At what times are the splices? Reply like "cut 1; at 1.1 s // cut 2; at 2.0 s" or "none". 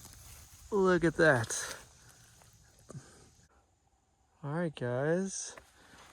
cut 1; at 3.8 s

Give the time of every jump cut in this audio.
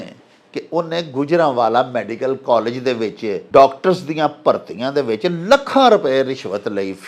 cut 1; at 3.4 s

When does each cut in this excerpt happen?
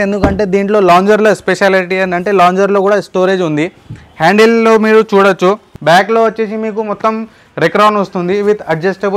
cut 1; at 5.7 s

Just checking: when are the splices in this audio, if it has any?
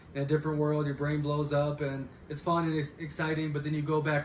none

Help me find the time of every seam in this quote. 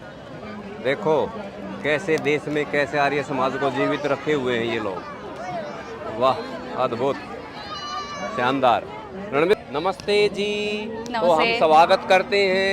cut 1; at 9.5 s

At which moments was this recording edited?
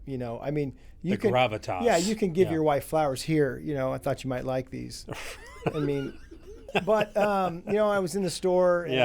cut 1; at 6.7 s

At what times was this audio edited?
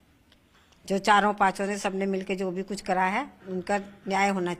none

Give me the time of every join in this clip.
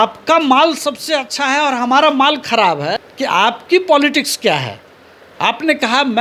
cut 1; at 3.1 s

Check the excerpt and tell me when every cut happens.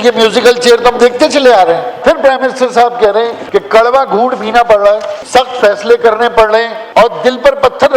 cut 1; at 2.0 s // cut 2; at 3.4 s // cut 3; at 5.1 s // cut 4; at 6.8 s

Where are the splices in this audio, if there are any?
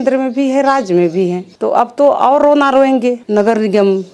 cut 1; at 1.5 s // cut 2; at 3.2 s

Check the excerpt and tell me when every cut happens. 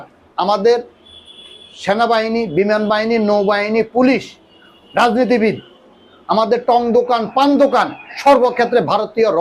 none

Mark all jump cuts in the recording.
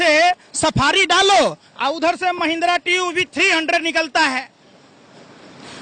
none

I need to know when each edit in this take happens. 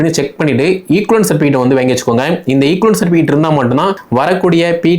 cut 1; at 4.0 s

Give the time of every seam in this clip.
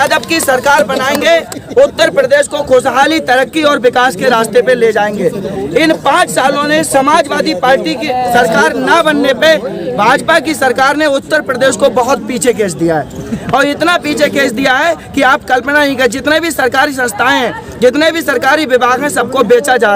none

